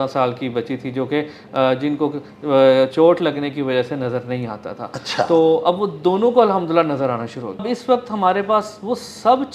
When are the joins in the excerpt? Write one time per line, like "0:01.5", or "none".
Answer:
0:07.6